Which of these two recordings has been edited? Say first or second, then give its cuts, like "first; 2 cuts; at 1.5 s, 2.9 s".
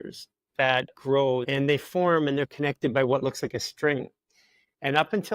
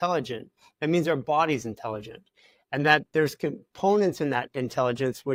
first; 1 cut; at 1.4 s